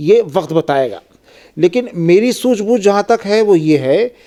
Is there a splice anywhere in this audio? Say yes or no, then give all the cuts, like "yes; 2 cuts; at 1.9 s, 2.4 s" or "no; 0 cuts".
no; 0 cuts